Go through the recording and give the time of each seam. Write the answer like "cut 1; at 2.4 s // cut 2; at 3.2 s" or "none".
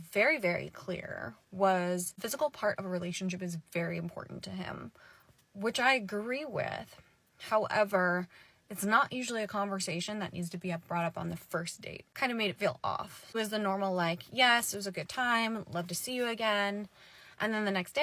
cut 1; at 12.6 s

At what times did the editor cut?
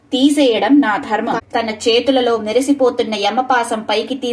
cut 1; at 1.4 s

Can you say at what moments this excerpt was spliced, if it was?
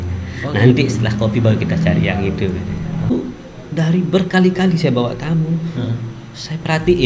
cut 1; at 3.1 s

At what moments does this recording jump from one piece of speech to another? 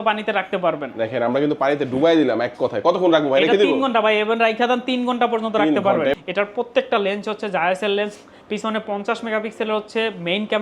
cut 1; at 6.1 s

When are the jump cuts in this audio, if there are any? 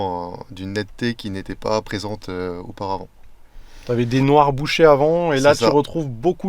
none

